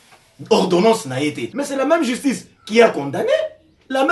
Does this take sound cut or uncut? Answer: cut